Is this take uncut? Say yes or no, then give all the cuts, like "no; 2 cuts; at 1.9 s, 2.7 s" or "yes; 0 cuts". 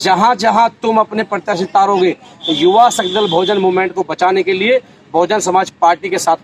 yes; 0 cuts